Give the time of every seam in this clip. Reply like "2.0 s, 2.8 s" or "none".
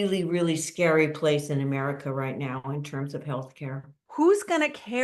4.0 s

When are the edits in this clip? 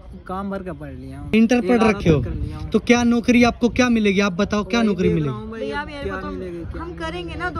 none

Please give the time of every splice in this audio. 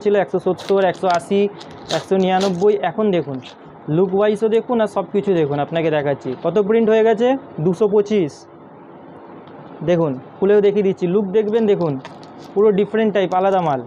none

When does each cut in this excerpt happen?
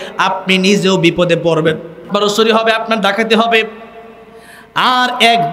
2.1 s

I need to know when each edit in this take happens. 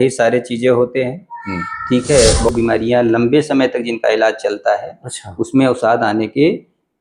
2.5 s

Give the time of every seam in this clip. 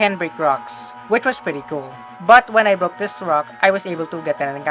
2.0 s

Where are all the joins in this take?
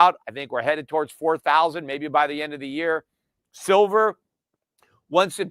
none

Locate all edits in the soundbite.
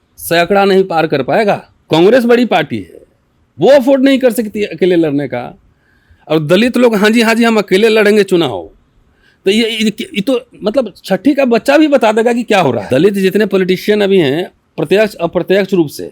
1.7 s, 12.8 s

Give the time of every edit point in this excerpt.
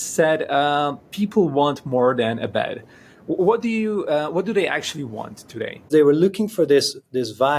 5.9 s

